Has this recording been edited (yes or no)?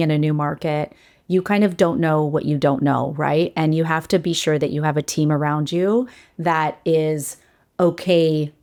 no